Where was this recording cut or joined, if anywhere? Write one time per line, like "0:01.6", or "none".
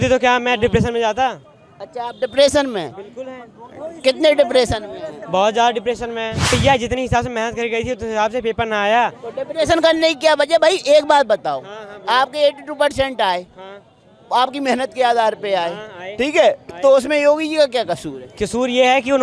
0:06.5